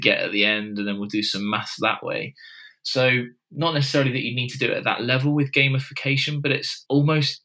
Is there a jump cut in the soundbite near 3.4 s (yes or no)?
no